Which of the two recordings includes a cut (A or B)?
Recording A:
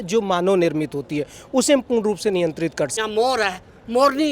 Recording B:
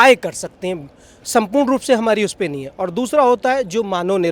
A